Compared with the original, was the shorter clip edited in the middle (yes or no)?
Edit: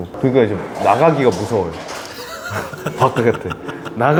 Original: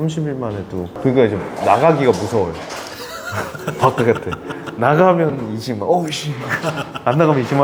no